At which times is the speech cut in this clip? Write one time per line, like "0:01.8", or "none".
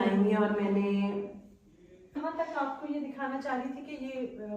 0:02.2